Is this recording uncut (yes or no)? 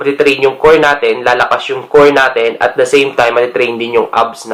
yes